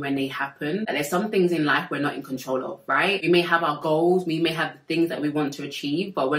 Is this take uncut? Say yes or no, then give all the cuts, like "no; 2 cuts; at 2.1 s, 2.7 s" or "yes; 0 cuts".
no; 2 cuts; at 0.8 s, 3.2 s